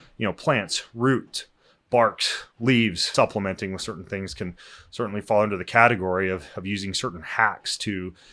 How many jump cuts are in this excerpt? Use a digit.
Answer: 1